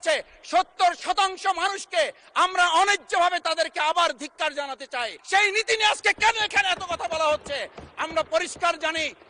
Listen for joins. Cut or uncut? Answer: cut